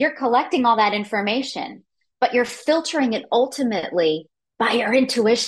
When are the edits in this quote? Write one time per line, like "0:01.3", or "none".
none